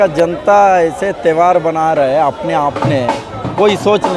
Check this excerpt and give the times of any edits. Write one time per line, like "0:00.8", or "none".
none